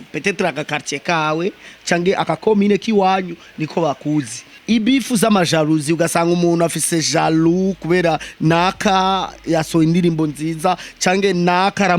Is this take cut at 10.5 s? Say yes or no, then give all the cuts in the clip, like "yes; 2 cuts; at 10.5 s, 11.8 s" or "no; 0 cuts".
no; 1 cut; at 4.5 s